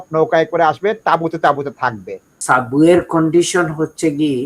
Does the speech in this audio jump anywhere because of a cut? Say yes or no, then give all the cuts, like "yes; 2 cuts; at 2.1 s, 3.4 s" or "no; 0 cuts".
yes; 1 cut; at 2.3 s